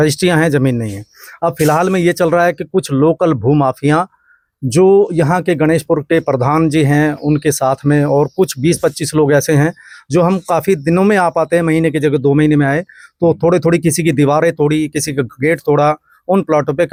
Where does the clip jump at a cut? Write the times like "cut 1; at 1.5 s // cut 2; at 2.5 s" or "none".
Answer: none